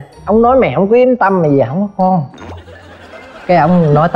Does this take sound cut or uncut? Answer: uncut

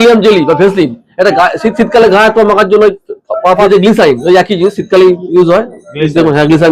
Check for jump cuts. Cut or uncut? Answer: cut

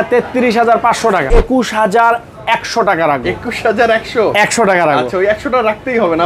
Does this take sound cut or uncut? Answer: cut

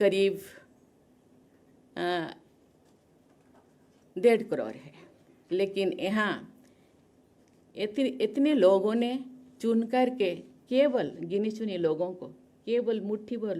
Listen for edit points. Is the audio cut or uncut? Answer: uncut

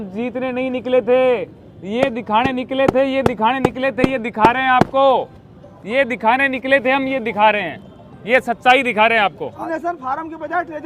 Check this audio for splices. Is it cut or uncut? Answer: cut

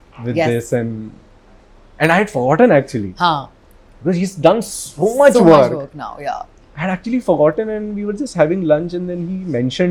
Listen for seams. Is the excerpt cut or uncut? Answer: uncut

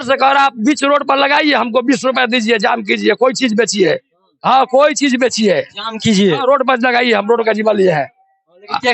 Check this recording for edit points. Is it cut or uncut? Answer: uncut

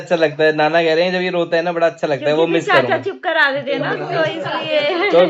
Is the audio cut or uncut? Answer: uncut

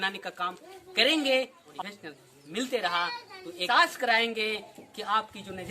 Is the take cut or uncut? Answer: cut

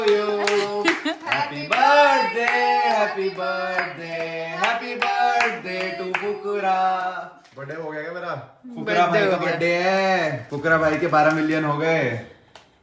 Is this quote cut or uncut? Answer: cut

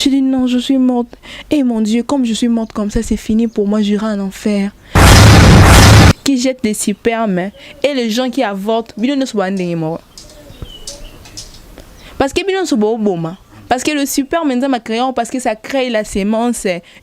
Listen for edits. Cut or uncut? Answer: cut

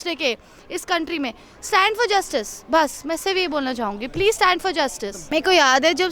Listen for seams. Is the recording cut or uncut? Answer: cut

